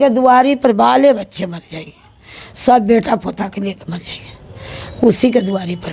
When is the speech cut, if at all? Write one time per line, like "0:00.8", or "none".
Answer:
none